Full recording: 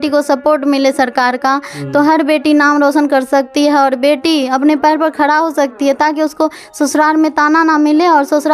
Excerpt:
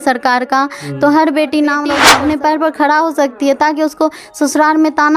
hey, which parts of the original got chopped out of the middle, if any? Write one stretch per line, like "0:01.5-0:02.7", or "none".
0:02.9-0:04.3